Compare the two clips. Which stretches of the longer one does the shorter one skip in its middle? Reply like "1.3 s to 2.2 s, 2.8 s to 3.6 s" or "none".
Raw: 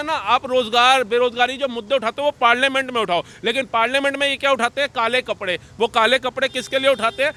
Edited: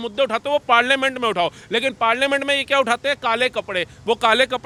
none